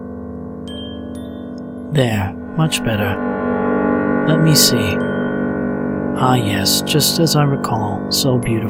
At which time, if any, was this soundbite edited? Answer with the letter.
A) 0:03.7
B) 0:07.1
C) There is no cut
C